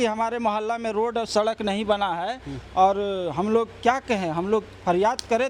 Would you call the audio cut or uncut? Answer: uncut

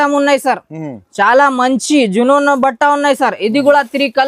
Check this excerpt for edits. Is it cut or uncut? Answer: uncut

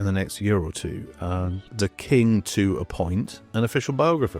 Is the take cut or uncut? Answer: uncut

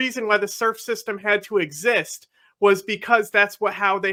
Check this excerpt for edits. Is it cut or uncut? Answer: uncut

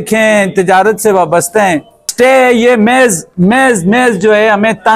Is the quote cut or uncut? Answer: cut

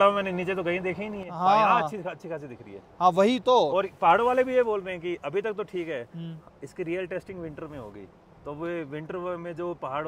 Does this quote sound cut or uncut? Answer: uncut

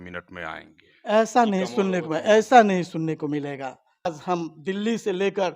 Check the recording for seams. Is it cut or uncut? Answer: cut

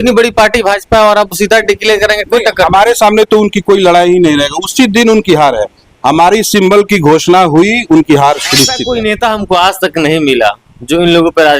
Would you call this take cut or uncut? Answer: cut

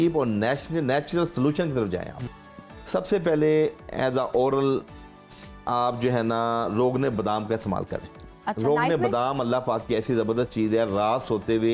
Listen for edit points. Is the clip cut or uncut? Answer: cut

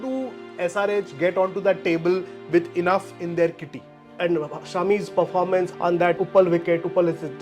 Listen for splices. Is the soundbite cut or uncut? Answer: cut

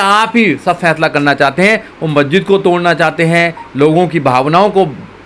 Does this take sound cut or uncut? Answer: uncut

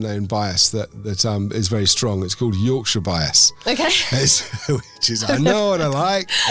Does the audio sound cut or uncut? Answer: uncut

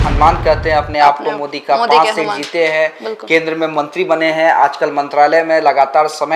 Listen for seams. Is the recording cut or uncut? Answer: uncut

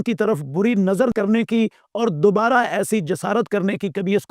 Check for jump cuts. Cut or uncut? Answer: cut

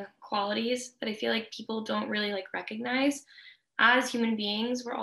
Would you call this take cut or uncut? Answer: uncut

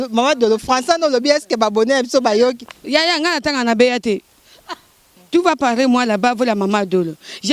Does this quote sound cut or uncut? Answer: cut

